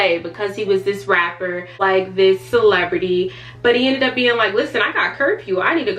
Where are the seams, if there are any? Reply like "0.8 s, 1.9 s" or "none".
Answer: 2.0 s

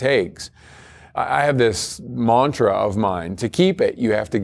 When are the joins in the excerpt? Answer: 1.6 s, 3.3 s

